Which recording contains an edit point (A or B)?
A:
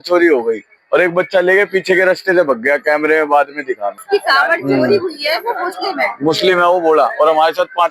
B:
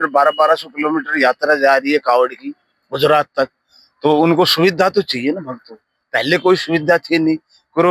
A